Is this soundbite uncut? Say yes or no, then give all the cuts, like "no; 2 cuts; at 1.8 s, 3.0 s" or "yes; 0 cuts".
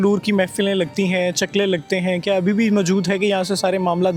yes; 0 cuts